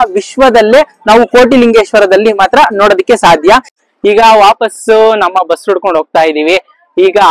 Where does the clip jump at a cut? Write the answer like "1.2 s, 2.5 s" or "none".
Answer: none